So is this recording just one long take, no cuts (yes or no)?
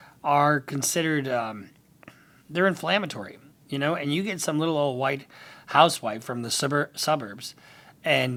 yes